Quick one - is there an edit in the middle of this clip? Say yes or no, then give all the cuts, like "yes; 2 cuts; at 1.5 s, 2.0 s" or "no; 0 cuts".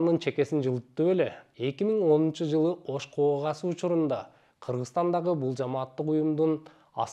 yes; 1 cut; at 1.4 s